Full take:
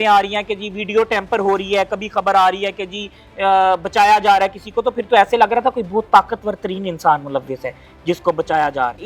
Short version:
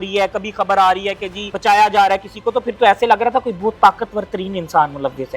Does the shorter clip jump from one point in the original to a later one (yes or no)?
yes